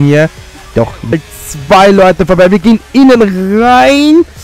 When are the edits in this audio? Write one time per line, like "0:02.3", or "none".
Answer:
0:01.3